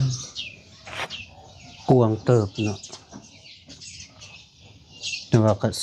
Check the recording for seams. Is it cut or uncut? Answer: uncut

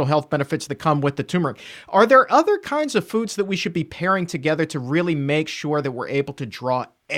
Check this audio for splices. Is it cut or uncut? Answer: uncut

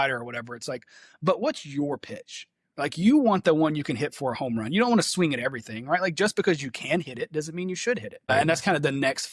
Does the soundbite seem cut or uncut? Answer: cut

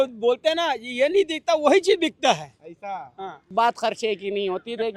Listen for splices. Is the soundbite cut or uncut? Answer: cut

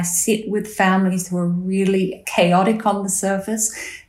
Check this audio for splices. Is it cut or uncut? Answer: cut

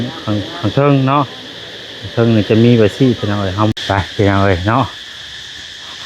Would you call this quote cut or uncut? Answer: cut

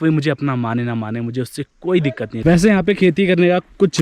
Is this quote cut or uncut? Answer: cut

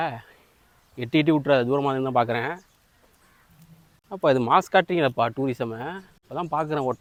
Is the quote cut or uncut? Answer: uncut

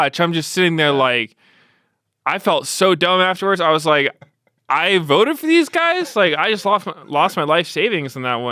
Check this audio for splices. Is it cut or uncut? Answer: uncut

